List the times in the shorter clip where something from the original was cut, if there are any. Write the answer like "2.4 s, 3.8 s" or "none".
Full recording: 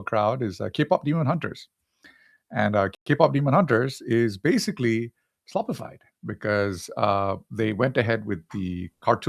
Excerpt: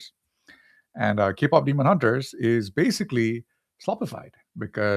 1.4 s